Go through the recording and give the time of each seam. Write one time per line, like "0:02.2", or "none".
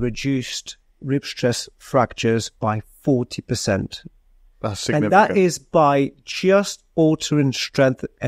none